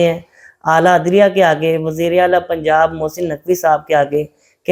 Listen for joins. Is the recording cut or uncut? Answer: uncut